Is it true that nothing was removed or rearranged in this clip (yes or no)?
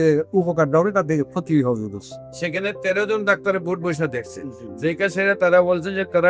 yes